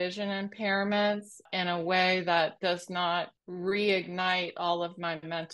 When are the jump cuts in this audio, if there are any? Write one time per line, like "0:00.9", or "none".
0:01.5
0:03.4